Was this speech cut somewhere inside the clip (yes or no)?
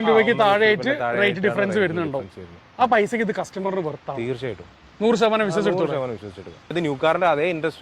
yes